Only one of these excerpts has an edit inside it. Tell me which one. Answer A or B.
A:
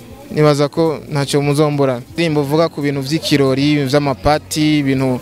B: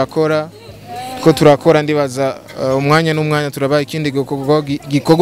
A